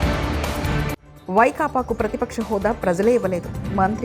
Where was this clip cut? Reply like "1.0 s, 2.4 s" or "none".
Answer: 1.1 s